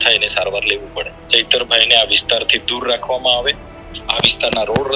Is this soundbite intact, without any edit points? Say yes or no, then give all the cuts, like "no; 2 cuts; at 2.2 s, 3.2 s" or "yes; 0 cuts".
no; 2 cuts; at 1.2 s, 3.8 s